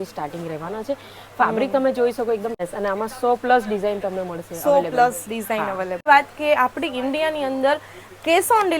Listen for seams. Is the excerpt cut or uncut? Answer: cut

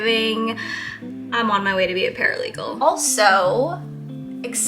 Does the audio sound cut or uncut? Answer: cut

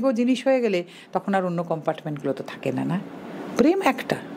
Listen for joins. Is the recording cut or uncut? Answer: uncut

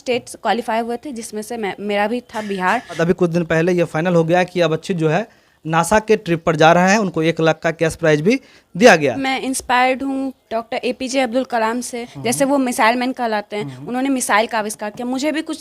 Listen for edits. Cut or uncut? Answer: cut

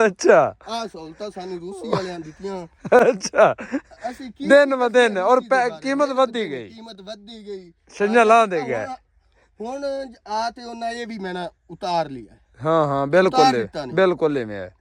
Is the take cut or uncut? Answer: uncut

